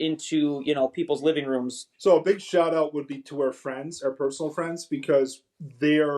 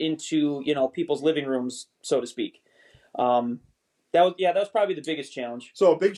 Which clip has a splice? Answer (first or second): first